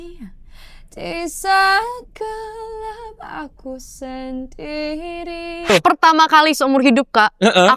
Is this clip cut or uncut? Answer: cut